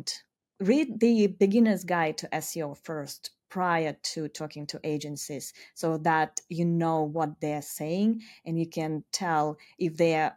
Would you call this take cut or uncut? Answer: uncut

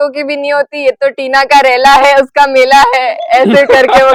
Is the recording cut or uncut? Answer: uncut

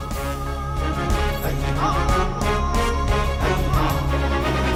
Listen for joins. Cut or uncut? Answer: uncut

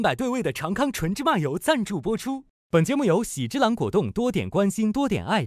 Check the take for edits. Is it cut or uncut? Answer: uncut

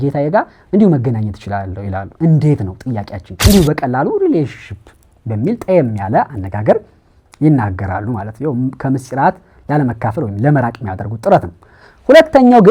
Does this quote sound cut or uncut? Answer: cut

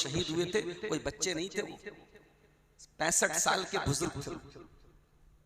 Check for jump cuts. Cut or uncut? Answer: uncut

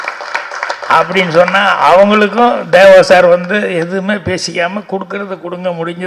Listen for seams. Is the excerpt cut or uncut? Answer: uncut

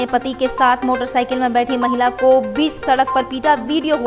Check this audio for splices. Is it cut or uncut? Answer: uncut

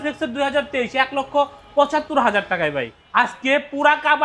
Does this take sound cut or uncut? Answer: cut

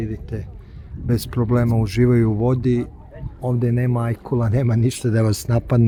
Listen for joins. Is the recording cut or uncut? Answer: uncut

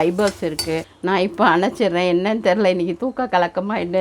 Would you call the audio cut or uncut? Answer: cut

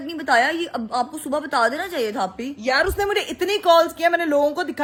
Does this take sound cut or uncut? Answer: uncut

